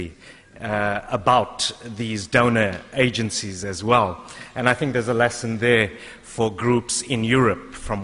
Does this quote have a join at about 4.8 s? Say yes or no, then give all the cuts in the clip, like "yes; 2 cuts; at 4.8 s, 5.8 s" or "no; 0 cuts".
no; 1 cut; at 2.8 s